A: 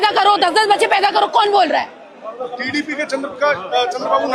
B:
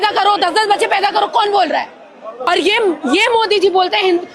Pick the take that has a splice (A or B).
B